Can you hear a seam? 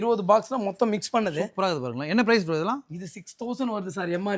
no; 0 cuts

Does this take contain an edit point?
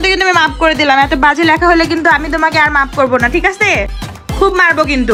no; 0 cuts

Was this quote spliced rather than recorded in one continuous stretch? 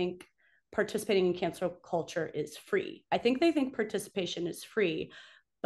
no; 0 cuts

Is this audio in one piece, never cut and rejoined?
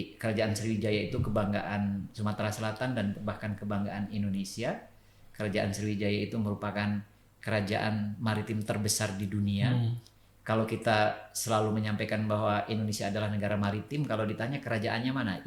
yes; 0 cuts

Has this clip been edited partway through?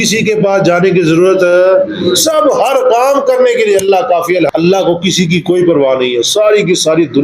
yes; 1 cut; at 4.5 s

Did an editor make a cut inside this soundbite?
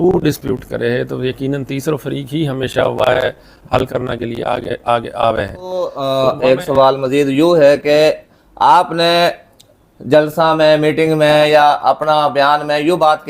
yes; 1 cut; at 5.9 s

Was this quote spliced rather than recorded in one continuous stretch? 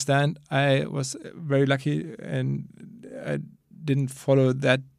no; 0 cuts

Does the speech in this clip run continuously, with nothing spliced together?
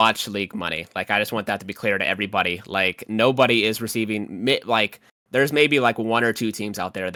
yes; 0 cuts

